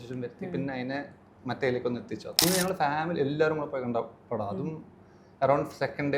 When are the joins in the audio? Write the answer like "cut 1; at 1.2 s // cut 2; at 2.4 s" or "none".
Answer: cut 1; at 2.4 s